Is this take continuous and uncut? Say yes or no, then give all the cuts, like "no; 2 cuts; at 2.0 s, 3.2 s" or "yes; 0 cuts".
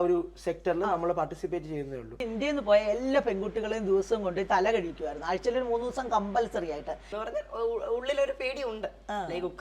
no; 2 cuts; at 2.2 s, 7.1 s